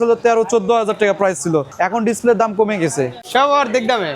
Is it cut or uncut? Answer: cut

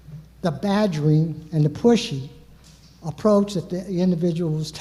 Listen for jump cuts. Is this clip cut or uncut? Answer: uncut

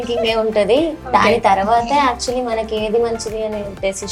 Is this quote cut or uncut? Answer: uncut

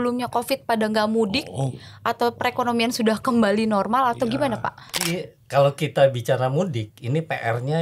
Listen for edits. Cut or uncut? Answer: cut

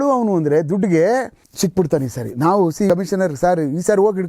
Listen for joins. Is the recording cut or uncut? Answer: cut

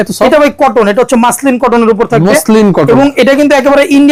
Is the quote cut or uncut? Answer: uncut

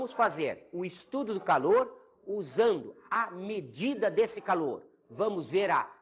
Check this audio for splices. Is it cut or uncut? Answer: cut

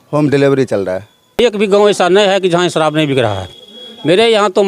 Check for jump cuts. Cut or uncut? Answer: cut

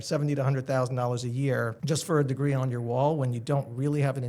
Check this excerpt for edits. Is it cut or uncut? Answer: cut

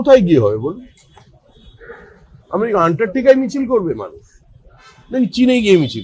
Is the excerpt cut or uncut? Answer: uncut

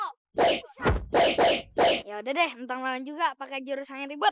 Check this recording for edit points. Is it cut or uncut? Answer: uncut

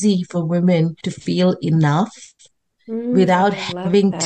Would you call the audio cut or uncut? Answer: cut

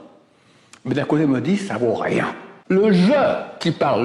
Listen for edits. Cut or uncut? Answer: cut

